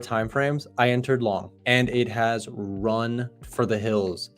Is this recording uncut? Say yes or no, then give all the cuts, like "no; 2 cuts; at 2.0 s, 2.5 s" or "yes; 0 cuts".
no; 2 cuts; at 1.5 s, 3.4 s